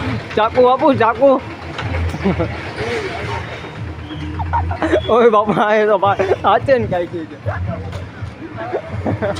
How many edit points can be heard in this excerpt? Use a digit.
0